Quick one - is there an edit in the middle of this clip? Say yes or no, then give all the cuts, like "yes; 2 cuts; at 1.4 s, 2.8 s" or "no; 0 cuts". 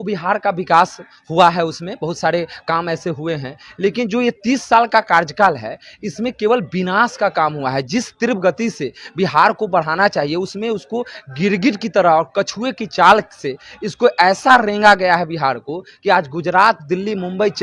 no; 0 cuts